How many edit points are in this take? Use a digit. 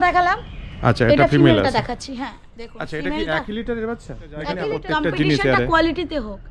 1